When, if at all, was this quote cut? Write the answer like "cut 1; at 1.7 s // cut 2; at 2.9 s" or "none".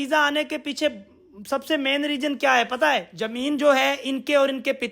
cut 1; at 3.2 s